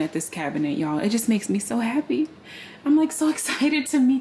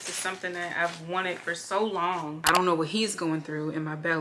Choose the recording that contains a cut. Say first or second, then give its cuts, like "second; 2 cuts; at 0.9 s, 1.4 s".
second; 1 cut; at 2.4 s